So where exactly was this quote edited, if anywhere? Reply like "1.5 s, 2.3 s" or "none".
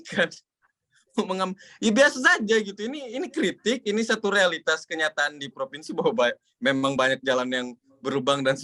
none